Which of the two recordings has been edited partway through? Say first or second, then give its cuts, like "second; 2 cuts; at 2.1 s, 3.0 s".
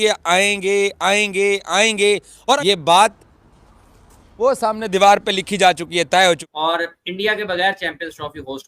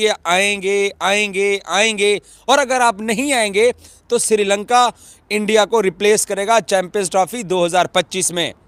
first; 2 cuts; at 2.6 s, 6.5 s